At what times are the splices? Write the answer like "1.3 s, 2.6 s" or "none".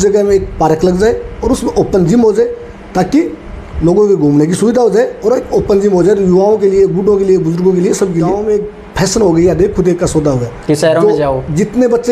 8.4 s